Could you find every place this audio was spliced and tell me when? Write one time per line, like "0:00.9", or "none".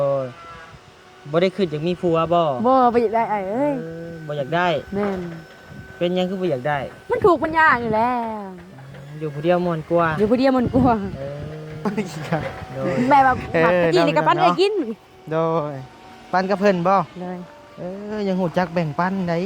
0:13.4